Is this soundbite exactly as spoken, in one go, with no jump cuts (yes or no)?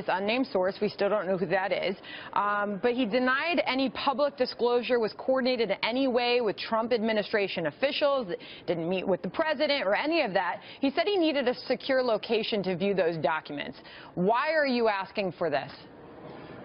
no